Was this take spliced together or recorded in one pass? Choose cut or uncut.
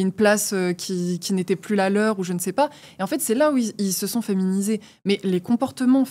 uncut